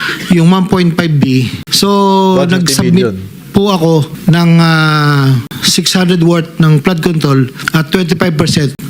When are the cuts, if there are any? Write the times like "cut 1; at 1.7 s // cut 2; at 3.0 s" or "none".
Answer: cut 1; at 1.6 s // cut 2; at 4.1 s